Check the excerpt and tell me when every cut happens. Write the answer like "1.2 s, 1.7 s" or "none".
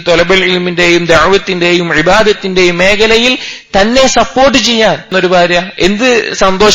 5.1 s

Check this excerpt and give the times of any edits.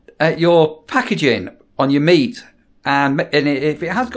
none

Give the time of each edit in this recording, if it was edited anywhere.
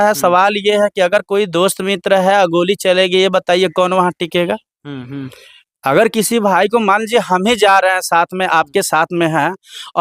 none

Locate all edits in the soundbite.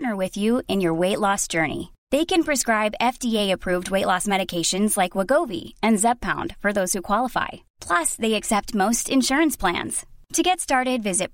none

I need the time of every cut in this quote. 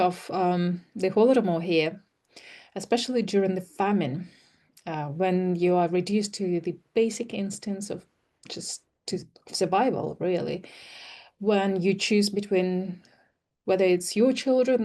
none

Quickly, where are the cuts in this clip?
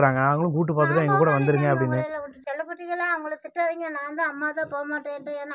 none

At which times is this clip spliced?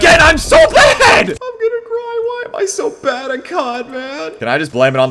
1.4 s

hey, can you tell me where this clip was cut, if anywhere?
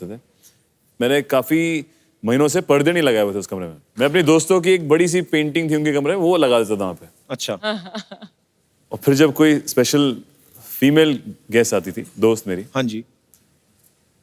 none

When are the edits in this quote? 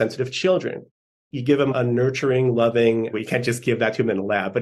1.7 s, 3.1 s

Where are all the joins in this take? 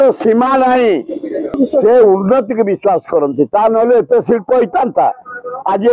1.6 s

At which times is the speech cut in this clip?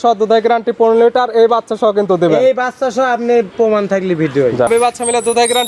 4.7 s

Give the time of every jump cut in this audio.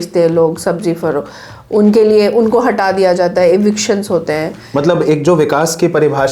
4.6 s

